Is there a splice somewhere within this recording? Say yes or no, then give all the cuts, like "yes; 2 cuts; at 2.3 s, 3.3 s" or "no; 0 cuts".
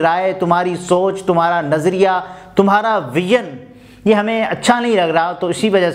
no; 0 cuts